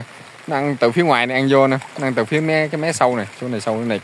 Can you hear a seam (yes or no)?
no